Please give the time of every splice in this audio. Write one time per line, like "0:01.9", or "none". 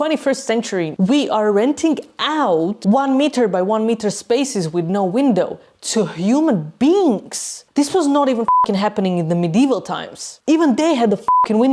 0:00.9

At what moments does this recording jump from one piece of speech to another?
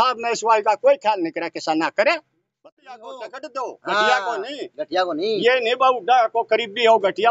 0:02.6

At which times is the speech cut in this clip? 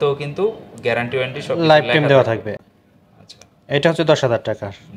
none

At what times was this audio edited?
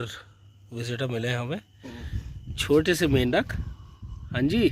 none

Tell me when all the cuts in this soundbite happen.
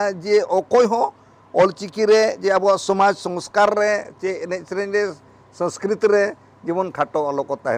none

